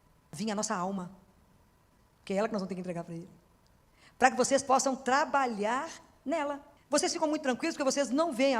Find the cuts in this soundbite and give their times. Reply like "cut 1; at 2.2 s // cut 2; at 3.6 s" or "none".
cut 1; at 6.7 s